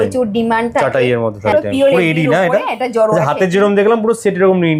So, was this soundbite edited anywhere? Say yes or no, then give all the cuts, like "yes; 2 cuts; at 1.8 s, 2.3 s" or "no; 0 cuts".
yes; 1 cut; at 1.5 s